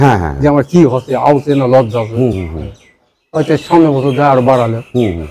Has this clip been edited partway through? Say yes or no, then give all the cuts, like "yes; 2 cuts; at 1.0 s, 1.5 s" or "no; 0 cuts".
no; 0 cuts